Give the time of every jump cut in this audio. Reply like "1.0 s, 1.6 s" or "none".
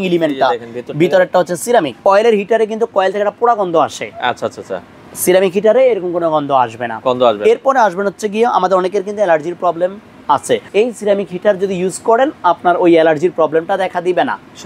2.0 s, 10.7 s